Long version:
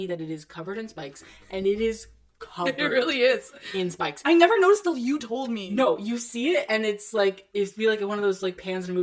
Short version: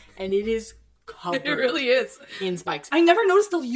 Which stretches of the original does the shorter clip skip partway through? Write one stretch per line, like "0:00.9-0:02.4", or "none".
none